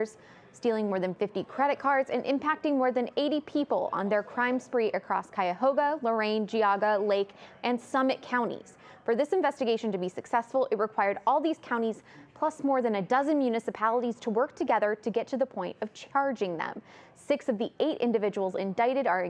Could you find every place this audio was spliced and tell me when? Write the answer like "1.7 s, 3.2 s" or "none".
none